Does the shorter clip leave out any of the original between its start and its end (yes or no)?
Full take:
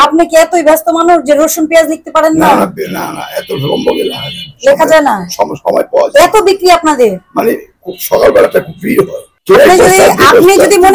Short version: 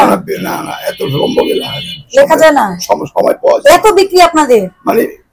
no